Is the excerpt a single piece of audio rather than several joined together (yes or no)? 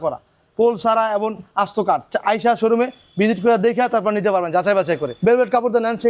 no